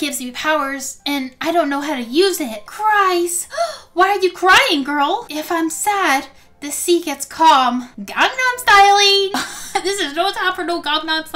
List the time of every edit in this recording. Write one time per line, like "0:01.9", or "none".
0:02.6
0:05.3